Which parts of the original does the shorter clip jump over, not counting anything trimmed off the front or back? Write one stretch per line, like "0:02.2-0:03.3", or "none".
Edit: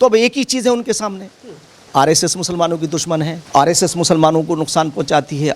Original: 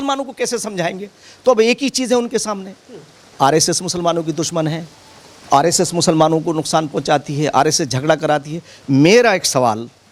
0:04.8-0:05.4